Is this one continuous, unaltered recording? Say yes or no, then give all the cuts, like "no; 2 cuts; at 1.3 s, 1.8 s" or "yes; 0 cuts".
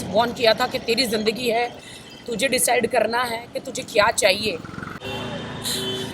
no; 1 cut; at 5.0 s